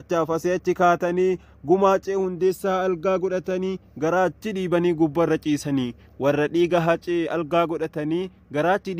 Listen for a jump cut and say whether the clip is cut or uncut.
uncut